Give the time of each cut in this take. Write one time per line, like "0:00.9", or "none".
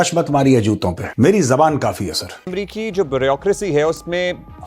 0:01.0
0:02.5